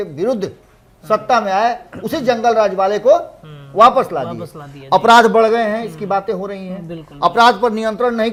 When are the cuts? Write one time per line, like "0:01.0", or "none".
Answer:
none